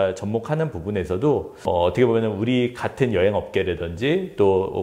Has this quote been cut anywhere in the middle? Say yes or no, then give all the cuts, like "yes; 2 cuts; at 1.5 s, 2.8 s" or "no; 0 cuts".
yes; 1 cut; at 1.6 s